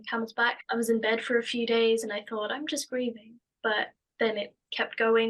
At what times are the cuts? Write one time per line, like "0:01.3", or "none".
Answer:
none